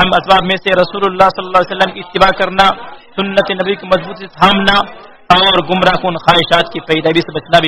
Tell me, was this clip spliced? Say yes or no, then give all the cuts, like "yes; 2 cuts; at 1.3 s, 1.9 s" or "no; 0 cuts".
no; 0 cuts